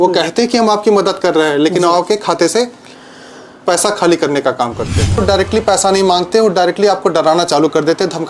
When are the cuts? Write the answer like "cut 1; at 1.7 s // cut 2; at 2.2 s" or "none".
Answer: cut 1; at 5.2 s